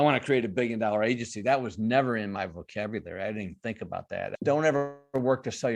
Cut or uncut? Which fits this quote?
cut